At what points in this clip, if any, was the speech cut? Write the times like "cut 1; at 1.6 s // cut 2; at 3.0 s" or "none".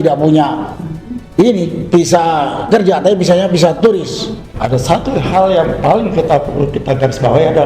cut 1; at 4.4 s